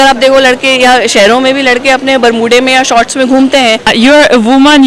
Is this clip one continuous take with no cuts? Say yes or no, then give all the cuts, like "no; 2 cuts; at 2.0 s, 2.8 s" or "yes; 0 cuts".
no; 1 cut; at 3.9 s